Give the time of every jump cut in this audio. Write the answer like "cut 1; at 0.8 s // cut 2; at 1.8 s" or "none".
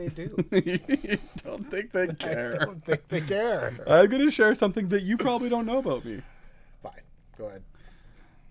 none